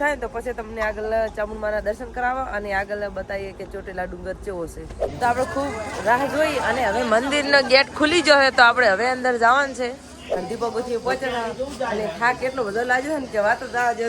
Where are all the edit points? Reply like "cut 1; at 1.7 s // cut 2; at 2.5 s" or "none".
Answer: cut 1; at 5.1 s // cut 2; at 10.4 s